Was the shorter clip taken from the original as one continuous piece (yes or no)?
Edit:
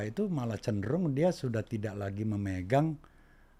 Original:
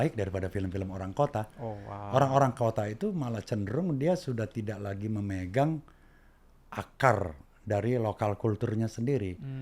yes